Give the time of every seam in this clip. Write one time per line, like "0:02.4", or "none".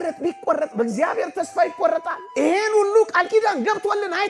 0:02.2